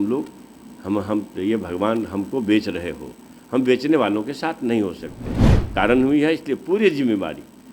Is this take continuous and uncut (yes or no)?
no